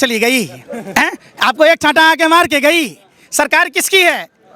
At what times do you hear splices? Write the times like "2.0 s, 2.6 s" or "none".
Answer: none